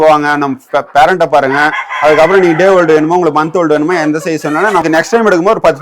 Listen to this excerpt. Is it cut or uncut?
cut